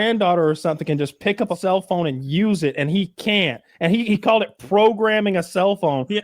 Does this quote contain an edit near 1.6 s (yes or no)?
yes